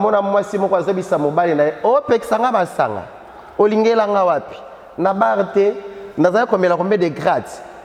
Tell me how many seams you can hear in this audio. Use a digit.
0